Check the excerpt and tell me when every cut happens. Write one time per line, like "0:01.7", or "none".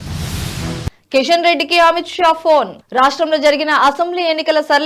none

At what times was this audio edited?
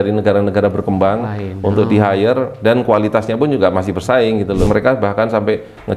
0:04.7

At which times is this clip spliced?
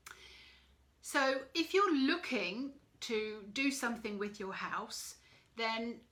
none

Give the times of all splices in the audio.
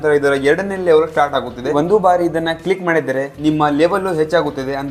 0:01.7

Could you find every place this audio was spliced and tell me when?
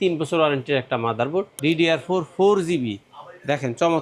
0:01.5

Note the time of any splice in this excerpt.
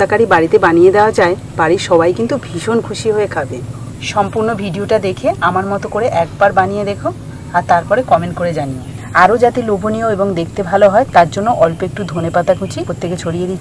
none

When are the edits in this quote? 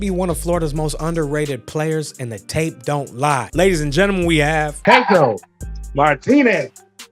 0:03.5
0:04.8

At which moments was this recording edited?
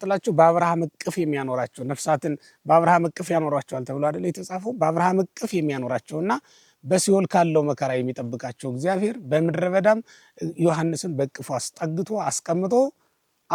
none

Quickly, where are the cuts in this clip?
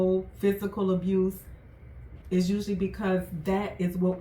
none

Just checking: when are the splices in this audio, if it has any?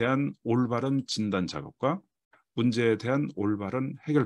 none

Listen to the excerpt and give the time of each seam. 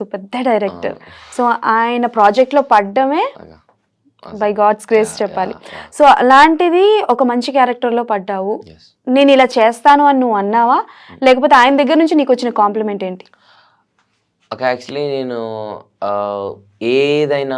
none

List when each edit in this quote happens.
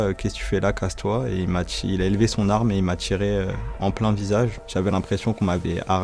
0:04.6

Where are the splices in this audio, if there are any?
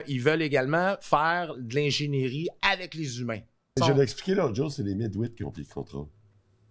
0:03.8

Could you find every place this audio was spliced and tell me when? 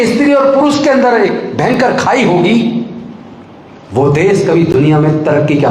none

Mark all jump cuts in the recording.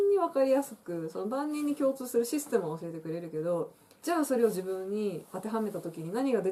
none

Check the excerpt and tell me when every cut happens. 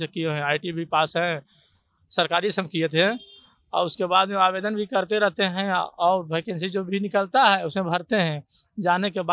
none

